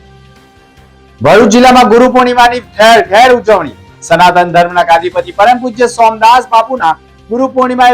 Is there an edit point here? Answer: no; 0 cuts

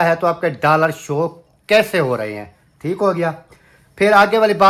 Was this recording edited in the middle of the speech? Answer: no; 0 cuts

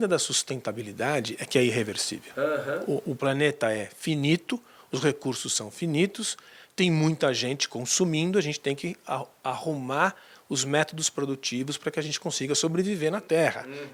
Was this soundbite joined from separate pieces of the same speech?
no; 0 cuts

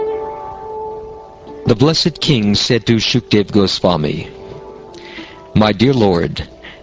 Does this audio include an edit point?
no; 0 cuts

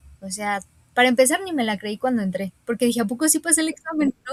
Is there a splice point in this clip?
no; 0 cuts

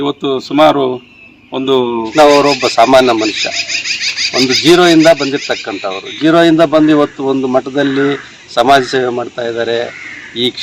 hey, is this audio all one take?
no; 1 cut; at 2.1 s

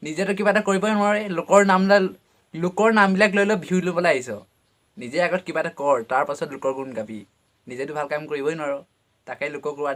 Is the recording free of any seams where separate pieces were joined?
yes; 0 cuts

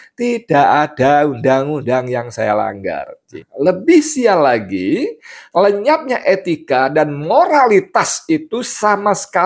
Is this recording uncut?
no; 1 cut; at 3.2 s

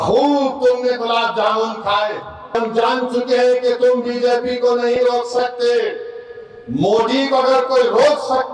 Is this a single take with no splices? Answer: no; 1 cut; at 2.5 s

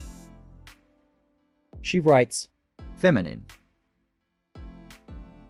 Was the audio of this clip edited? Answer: no; 0 cuts

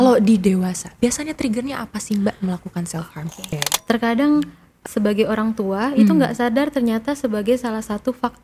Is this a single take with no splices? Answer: no; 2 cuts; at 3.6 s, 4.7 s

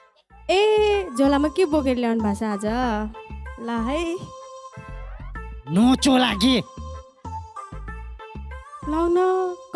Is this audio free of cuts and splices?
no; 2 cuts; at 4.2 s, 5.6 s

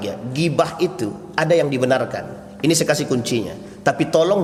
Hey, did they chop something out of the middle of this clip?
no; 0 cuts

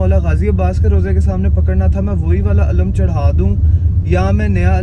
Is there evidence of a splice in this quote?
no; 0 cuts

